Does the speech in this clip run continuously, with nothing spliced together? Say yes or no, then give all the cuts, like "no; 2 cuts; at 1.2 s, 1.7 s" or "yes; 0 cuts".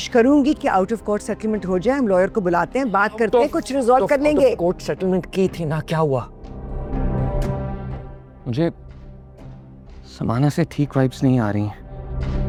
yes; 0 cuts